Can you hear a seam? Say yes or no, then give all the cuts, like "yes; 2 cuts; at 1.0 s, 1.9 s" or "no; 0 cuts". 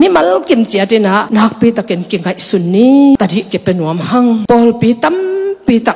yes; 3 cuts; at 1.3 s, 3.2 s, 4.4 s